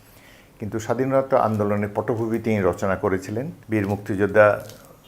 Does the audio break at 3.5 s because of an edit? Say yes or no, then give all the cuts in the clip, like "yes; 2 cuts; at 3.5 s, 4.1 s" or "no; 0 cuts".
yes; 1 cut; at 3.5 s